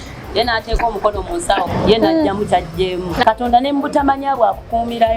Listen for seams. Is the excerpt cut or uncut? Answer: cut